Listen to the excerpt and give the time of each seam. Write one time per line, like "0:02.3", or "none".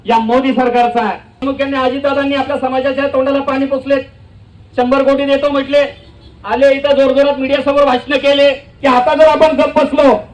0:01.4
0:08.7